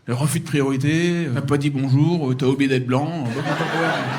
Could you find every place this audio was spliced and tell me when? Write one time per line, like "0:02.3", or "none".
none